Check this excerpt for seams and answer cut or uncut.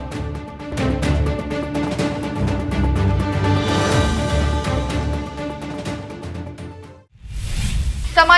cut